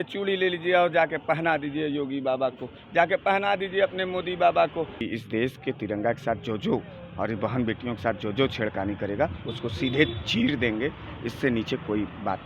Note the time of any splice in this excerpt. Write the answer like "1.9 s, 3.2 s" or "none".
5.0 s